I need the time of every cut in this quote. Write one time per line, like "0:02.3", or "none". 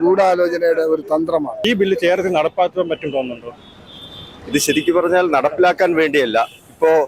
none